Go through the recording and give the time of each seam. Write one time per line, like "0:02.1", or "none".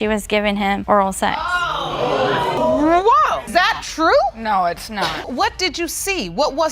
0:02.6
0:03.4
0:05.2